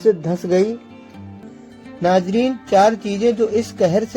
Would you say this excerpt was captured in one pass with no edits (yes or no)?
no